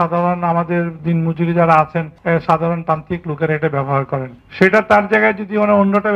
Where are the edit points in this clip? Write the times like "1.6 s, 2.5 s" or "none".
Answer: 2.1 s, 4.4 s